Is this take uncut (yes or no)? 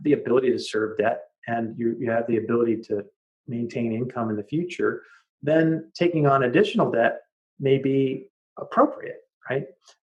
yes